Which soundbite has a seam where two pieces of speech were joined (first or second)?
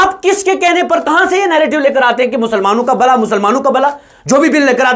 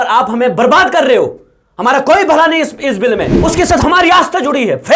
second